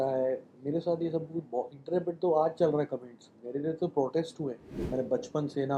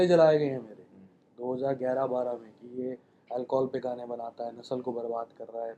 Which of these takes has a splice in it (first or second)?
first